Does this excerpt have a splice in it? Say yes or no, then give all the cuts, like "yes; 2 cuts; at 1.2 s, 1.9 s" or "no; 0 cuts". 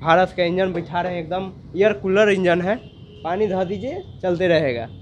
no; 0 cuts